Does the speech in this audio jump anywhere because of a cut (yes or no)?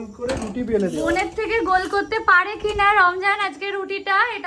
no